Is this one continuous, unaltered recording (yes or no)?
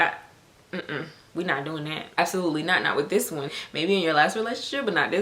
no